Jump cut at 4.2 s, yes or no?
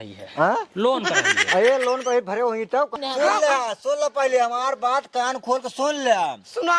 no